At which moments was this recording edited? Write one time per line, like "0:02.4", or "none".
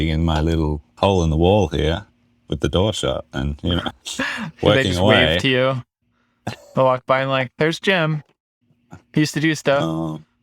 none